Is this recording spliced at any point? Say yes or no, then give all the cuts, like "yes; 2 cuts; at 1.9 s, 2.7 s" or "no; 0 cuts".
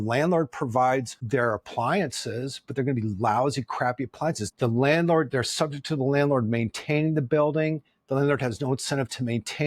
yes; 1 cut; at 4.4 s